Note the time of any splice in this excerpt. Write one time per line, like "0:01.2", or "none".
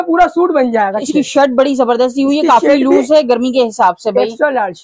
0:01.1